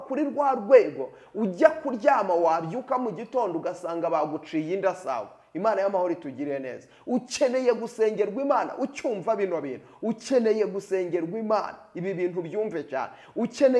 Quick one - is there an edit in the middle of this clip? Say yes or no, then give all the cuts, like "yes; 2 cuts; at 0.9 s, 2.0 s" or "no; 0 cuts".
no; 0 cuts